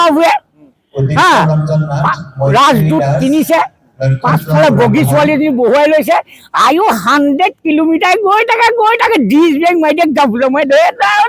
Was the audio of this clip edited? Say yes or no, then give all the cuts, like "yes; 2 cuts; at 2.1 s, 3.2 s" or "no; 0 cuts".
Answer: no; 0 cuts